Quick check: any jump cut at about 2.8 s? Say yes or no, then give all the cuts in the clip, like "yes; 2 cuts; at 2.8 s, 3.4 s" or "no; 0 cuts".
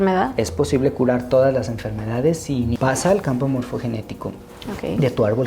yes; 1 cut; at 2.8 s